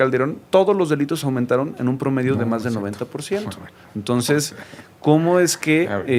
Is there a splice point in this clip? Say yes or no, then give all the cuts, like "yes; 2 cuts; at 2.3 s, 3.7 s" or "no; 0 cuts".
no; 0 cuts